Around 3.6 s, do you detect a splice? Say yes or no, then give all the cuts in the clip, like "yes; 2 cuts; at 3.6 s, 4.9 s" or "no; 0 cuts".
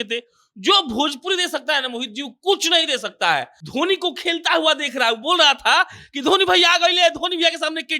yes; 1 cut; at 3.6 s